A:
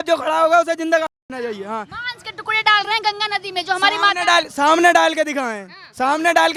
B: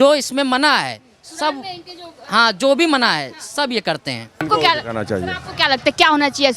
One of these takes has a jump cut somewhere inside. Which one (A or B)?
B